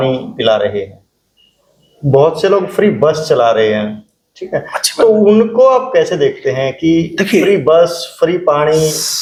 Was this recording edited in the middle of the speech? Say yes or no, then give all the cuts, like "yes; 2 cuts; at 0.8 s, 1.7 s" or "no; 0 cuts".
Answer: no; 0 cuts